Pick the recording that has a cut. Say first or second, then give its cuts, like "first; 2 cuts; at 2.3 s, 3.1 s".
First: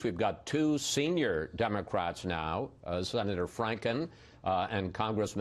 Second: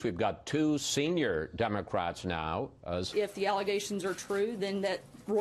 first; 1 cut; at 3.1 s